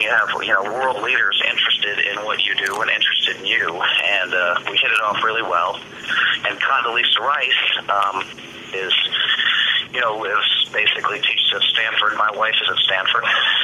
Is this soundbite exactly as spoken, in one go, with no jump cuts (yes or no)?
yes